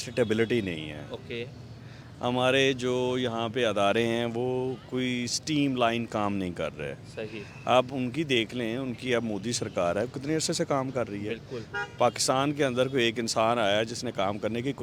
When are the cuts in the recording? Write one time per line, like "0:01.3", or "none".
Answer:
none